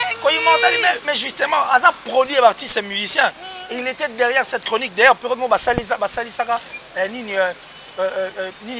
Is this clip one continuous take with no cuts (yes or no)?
yes